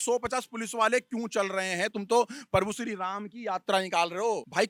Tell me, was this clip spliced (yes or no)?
no